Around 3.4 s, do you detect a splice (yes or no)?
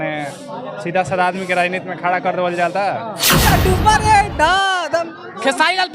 yes